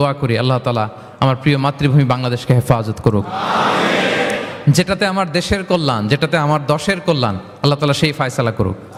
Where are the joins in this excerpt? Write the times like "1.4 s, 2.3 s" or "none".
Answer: none